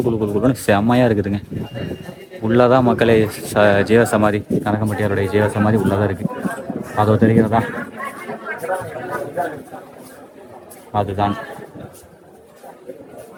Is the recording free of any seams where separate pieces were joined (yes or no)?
yes